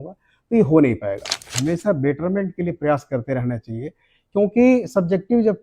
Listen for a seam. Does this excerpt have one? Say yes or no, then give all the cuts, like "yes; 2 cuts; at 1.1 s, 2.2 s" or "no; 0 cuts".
yes; 1 cut; at 1.5 s